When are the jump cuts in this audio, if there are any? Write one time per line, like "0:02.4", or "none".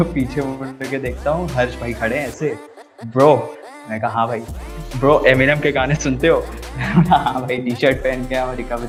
none